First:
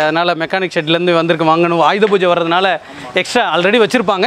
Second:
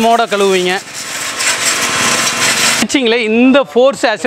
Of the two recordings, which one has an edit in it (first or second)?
second